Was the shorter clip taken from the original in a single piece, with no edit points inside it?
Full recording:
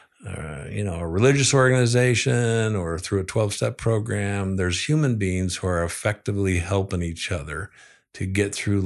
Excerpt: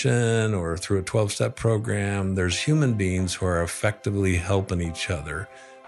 yes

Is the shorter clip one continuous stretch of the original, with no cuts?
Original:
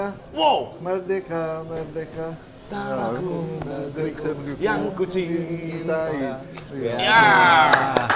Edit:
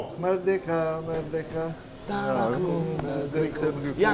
yes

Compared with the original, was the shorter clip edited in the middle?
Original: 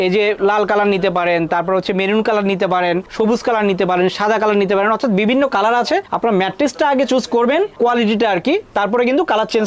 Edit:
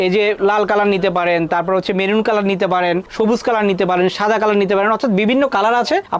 no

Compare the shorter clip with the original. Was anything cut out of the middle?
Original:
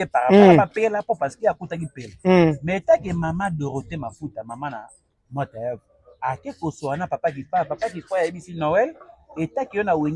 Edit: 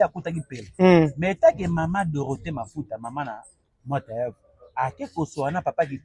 no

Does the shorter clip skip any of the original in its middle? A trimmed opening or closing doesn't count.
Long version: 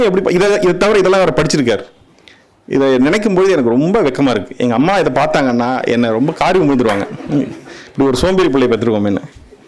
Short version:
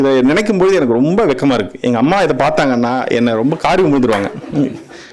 no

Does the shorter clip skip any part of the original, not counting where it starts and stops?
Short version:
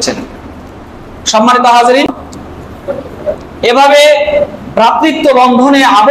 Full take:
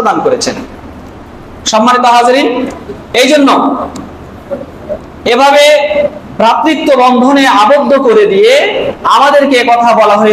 yes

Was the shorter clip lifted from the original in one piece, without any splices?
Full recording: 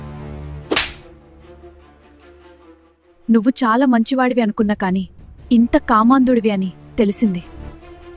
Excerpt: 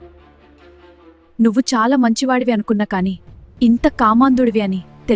no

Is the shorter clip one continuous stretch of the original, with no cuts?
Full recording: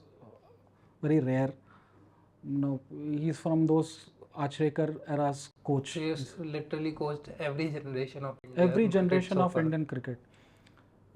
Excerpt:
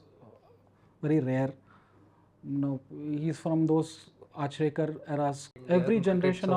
no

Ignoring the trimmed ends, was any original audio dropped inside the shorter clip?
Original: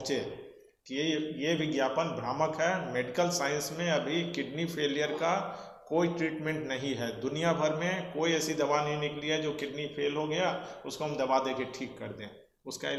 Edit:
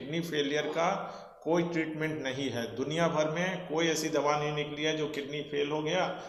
no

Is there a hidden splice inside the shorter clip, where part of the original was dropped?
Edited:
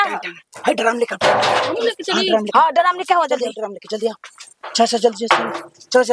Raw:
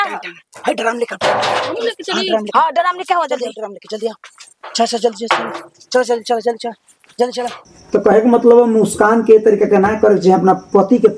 no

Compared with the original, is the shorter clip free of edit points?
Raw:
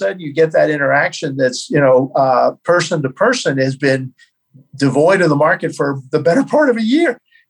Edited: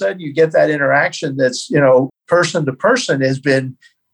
no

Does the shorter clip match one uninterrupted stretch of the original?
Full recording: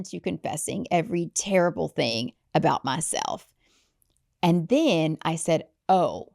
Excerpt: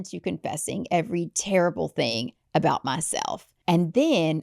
no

